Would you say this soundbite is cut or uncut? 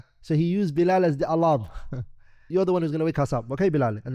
cut